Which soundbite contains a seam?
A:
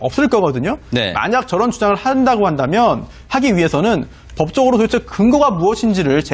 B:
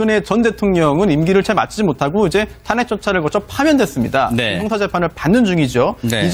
B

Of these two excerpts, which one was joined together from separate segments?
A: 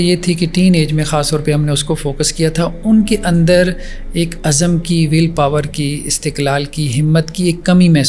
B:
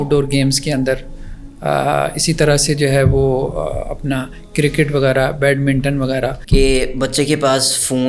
B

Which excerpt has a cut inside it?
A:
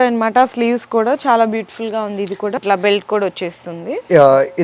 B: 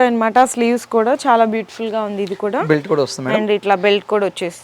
A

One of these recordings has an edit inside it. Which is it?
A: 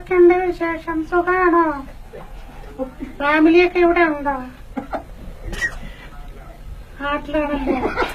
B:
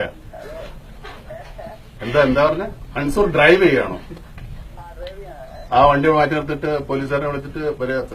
B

